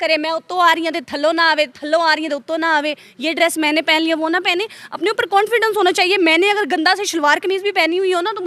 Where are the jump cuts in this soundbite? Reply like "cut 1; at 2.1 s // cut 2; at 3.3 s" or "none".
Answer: none